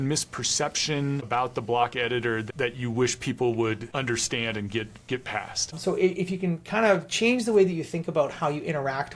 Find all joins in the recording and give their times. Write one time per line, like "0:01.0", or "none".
0:01.2
0:03.8
0:05.8